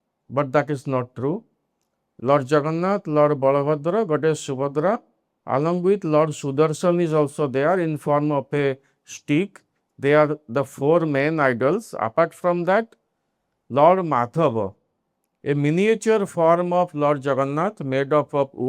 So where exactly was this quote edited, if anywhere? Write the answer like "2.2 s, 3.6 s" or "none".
none